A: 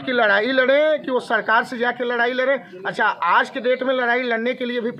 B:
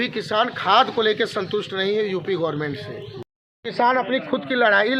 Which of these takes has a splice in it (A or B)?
B